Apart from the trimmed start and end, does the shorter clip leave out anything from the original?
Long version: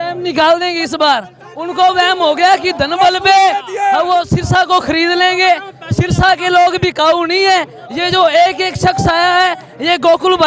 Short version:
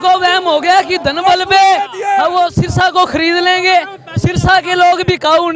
no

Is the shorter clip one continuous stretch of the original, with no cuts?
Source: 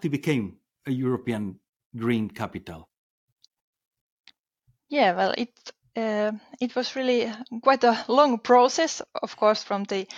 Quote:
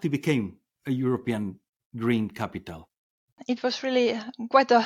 no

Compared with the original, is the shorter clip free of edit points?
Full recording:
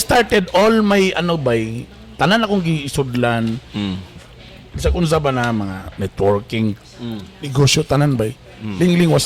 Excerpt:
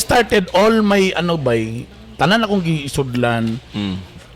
yes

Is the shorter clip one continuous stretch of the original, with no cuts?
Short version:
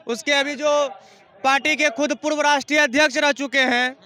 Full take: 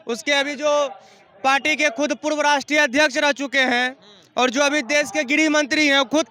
yes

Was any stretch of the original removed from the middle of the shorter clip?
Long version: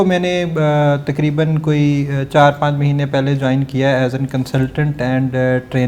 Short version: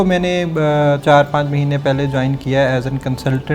yes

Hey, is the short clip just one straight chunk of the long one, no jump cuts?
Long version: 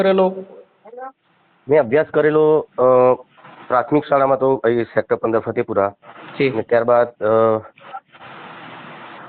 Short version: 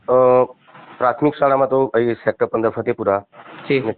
yes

